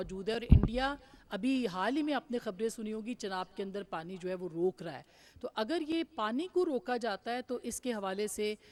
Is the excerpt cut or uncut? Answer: uncut